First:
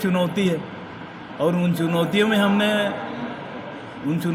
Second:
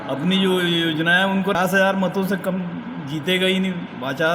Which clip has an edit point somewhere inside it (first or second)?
second